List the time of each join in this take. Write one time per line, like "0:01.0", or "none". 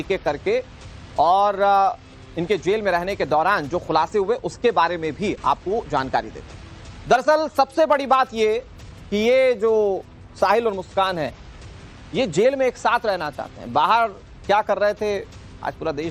none